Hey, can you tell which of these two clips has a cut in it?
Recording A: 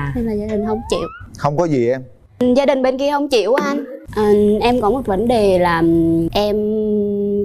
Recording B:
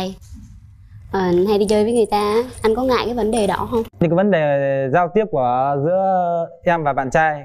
A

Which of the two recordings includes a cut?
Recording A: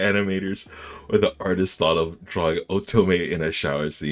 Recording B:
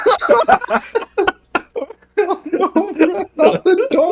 B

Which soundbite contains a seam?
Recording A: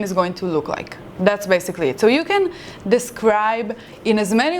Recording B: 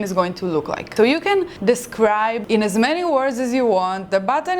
B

